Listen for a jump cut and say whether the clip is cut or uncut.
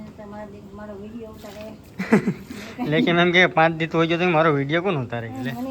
uncut